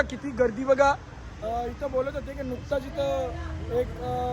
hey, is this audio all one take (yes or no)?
yes